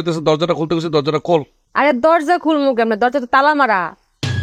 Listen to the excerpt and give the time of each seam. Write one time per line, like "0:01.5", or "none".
0:01.6